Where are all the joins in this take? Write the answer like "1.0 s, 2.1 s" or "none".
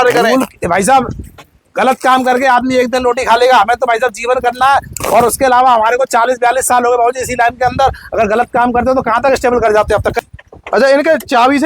10.2 s